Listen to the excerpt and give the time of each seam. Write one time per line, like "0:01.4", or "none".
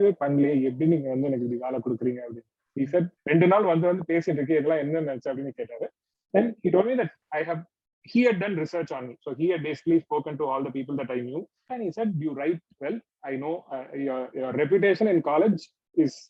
0:03.1
0:11.6